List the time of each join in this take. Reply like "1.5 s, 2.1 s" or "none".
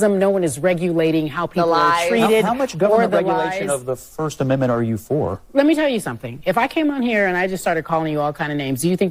none